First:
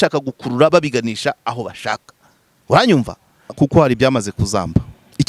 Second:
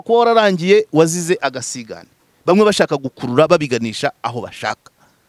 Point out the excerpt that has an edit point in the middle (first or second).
first